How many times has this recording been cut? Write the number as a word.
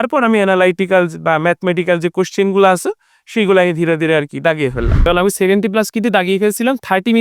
one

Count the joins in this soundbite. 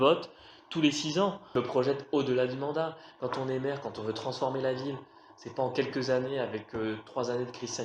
one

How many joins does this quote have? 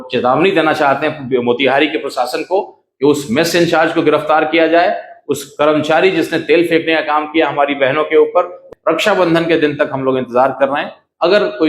one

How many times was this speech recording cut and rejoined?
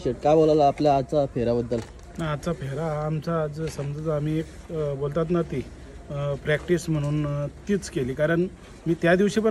zero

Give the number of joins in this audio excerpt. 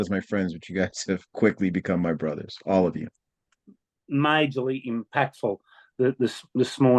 one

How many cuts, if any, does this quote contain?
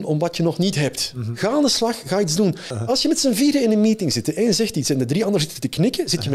two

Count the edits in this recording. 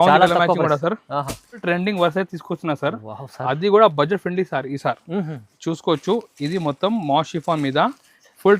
one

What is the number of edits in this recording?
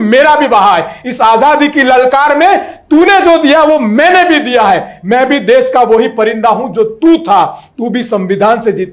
zero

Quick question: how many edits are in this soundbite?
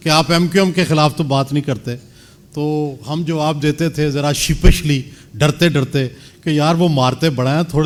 zero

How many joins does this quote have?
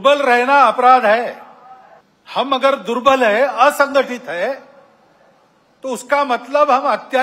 zero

